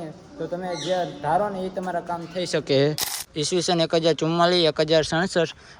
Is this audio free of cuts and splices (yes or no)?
no